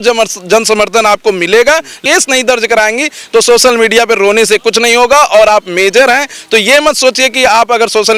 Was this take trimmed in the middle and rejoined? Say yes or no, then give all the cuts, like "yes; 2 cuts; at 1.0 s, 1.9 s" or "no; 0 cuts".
yes; 1 cut; at 2.0 s